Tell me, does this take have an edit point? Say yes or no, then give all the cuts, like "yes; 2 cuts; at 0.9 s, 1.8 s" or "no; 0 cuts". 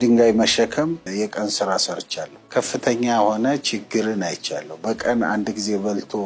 no; 0 cuts